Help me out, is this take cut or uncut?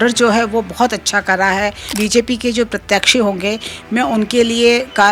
cut